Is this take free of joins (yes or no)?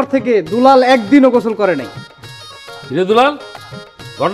yes